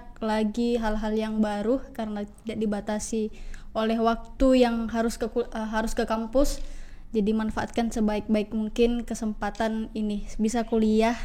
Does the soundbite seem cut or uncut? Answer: uncut